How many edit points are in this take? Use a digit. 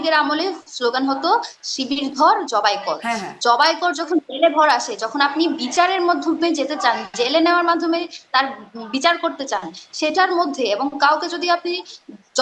0